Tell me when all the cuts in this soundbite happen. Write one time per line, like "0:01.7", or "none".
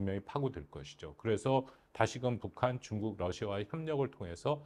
none